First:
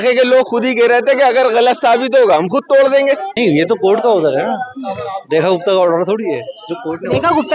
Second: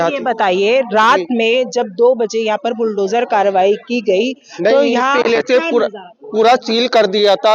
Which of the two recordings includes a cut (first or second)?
first